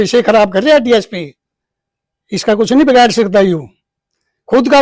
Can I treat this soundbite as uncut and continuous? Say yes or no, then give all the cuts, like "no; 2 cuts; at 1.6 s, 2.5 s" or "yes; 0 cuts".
yes; 0 cuts